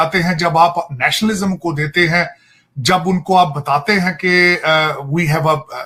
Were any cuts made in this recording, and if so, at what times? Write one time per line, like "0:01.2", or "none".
none